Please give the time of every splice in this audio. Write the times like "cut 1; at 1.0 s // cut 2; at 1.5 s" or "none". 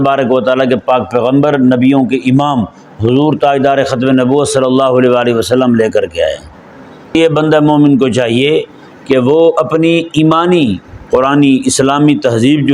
cut 1; at 7.1 s